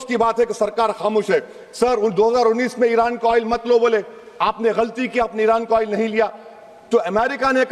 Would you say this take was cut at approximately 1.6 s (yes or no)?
no